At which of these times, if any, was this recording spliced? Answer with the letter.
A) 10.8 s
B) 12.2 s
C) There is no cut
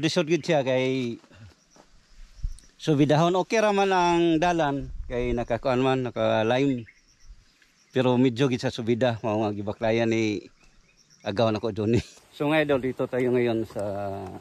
B